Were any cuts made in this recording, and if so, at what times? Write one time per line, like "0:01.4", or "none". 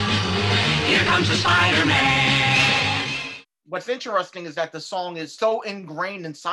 0:03.1
0:05.3